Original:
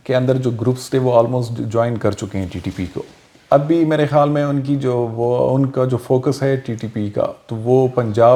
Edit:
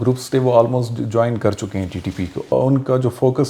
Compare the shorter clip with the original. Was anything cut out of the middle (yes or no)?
yes